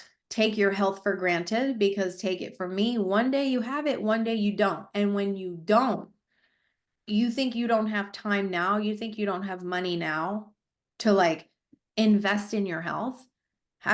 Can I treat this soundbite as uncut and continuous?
yes; 0 cuts

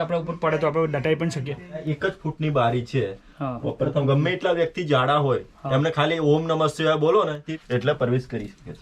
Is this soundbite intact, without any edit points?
no; 2 cuts; at 1.8 s, 7.5 s

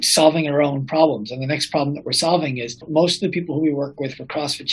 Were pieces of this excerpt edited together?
yes; 1 cut; at 2.9 s

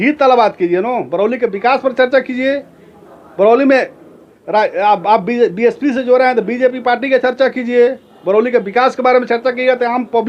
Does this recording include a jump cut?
no; 0 cuts

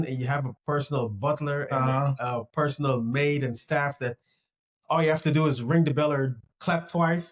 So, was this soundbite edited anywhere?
no; 0 cuts

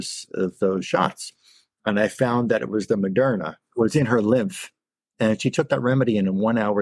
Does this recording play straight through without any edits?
no; 1 cut; at 3.6 s

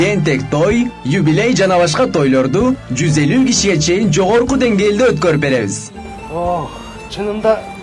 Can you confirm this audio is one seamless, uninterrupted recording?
yes; 0 cuts

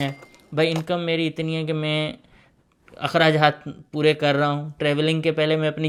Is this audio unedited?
yes; 0 cuts

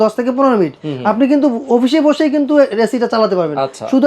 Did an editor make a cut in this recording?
no; 0 cuts

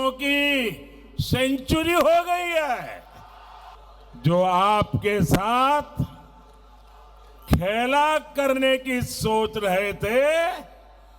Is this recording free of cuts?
no; 1 cut; at 3.7 s

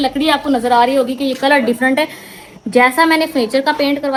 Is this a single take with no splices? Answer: yes; 0 cuts

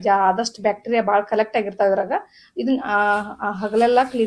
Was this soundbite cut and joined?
no; 0 cuts

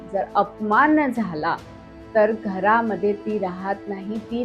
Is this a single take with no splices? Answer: yes; 0 cuts

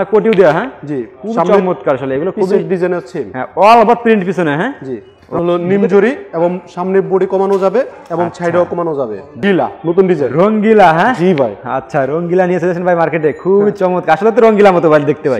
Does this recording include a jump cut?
yes; 2 cuts; at 5.4 s, 9.4 s

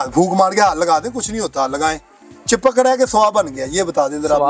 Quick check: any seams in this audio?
no; 0 cuts

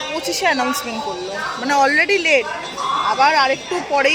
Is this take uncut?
yes; 0 cuts

